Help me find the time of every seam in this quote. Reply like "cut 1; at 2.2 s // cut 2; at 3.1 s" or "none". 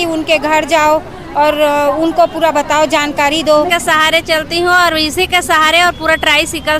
cut 1; at 3.7 s